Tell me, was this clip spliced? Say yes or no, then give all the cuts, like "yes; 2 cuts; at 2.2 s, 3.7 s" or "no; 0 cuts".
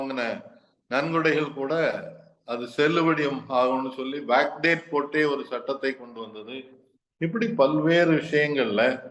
no; 0 cuts